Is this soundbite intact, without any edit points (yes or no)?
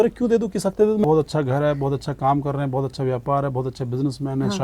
no